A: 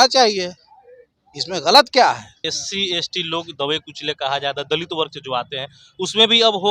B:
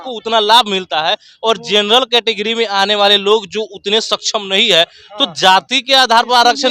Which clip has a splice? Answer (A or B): A